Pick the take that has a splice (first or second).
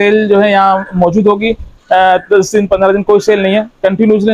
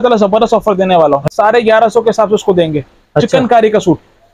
second